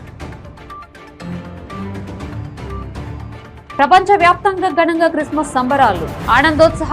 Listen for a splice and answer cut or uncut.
cut